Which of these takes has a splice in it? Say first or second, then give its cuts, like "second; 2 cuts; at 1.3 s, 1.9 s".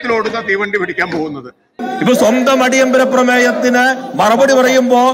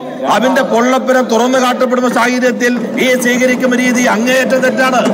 first; 1 cut; at 1.8 s